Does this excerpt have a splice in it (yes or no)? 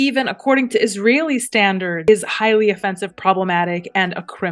yes